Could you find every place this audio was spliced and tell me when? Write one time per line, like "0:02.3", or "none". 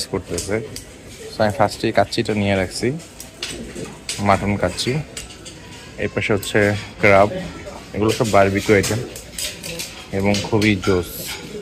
none